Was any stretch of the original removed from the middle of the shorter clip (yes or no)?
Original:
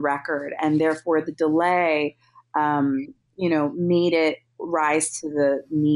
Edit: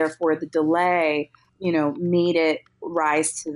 yes